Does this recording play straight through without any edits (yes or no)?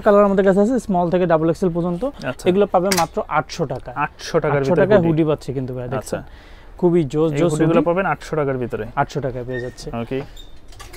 yes